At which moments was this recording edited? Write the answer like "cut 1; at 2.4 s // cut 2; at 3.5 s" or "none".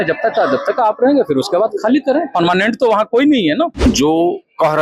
cut 1; at 3.7 s